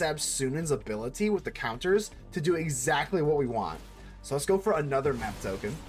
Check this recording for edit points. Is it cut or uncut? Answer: uncut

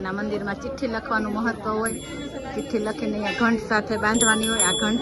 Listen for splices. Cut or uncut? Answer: uncut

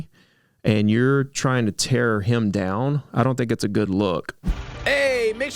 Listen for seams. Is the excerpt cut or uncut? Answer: cut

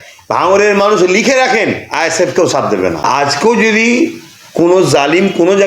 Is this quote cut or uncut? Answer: cut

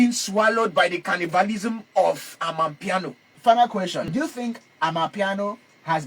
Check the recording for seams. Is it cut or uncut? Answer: cut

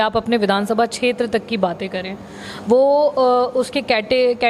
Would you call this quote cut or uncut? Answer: uncut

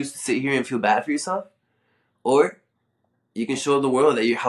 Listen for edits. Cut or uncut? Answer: uncut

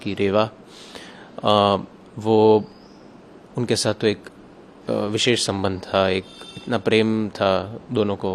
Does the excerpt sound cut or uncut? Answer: uncut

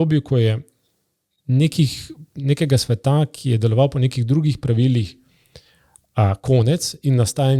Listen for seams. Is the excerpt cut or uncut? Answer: uncut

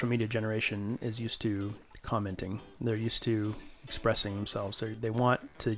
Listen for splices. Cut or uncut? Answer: cut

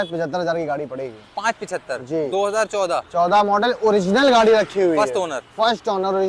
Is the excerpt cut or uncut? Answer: uncut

